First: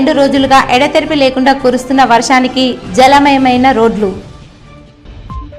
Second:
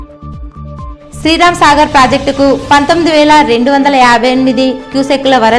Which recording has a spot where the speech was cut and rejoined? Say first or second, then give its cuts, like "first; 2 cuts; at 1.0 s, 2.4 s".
second; 1 cut; at 1.0 s